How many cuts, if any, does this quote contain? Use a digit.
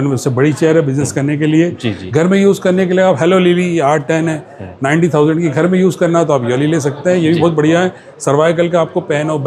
0